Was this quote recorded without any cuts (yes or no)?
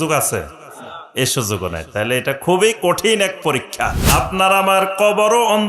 no